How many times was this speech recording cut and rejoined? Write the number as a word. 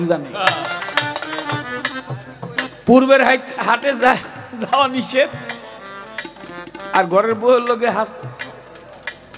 zero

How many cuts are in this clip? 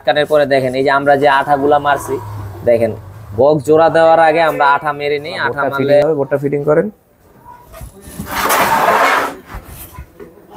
one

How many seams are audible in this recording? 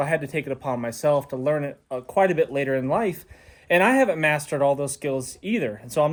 zero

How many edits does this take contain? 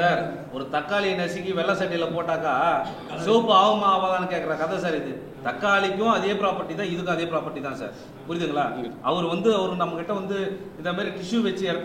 zero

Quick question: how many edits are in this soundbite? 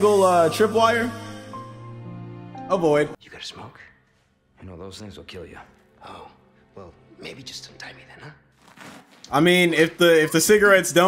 two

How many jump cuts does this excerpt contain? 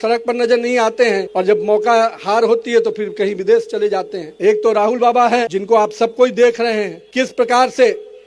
four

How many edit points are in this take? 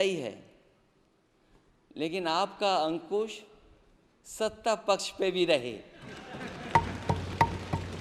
zero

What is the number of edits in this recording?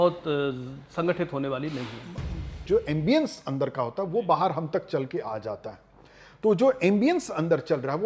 one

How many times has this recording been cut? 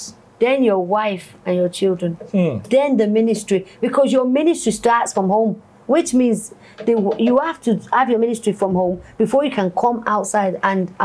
zero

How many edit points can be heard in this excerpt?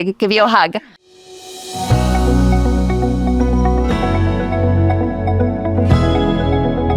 one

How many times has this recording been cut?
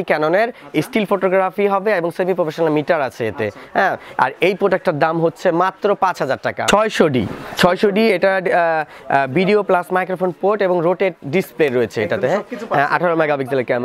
one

